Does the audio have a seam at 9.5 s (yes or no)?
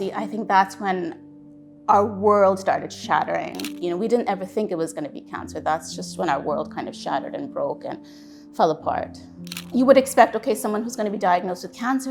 yes